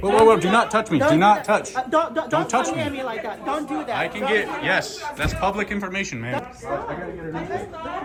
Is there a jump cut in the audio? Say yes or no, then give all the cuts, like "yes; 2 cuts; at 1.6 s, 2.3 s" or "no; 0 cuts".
no; 0 cuts